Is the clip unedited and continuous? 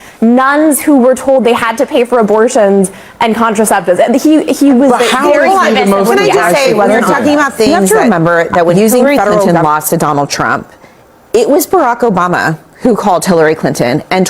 no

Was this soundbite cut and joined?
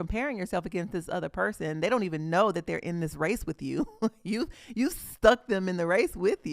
no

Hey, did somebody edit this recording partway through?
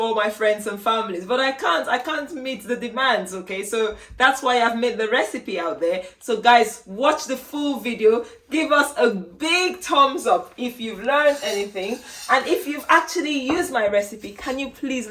no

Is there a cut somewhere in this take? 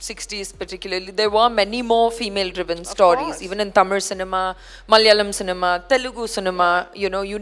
no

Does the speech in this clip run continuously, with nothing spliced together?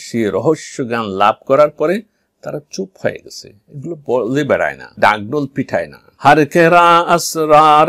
yes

